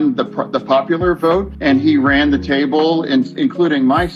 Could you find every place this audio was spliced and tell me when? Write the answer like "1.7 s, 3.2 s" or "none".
1.5 s